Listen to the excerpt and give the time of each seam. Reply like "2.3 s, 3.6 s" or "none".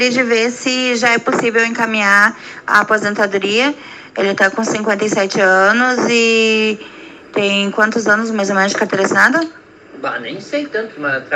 3.0 s